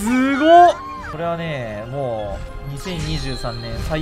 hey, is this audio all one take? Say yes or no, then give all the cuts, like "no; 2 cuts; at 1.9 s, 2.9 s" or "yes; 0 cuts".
no; 1 cut; at 1.0 s